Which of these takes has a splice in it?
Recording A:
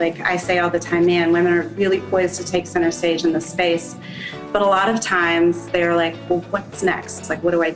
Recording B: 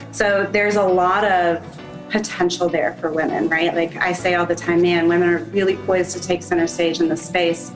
B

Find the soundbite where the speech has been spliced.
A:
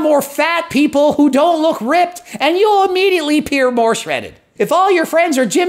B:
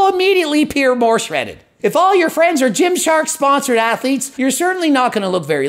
B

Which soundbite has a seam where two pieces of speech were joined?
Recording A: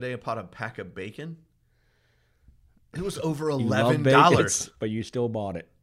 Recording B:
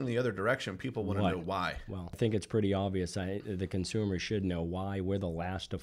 B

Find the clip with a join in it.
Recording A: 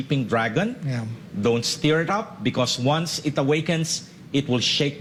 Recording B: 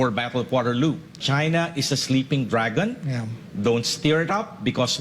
B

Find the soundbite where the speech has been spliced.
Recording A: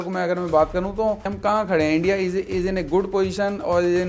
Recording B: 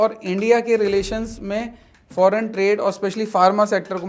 A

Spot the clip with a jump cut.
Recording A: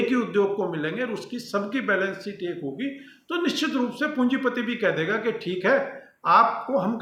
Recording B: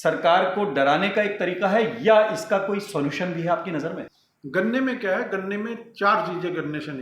B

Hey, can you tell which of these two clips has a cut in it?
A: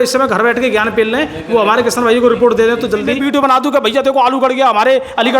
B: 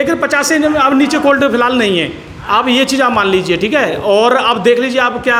A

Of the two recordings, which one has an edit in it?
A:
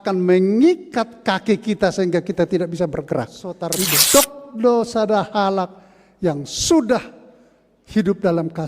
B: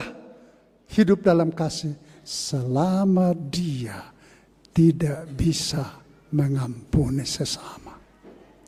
A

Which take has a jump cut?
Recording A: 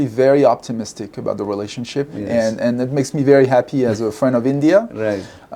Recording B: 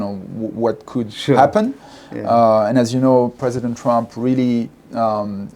A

